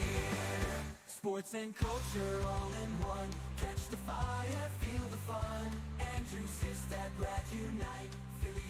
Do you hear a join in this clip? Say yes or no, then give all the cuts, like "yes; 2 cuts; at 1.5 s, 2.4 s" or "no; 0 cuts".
no; 0 cuts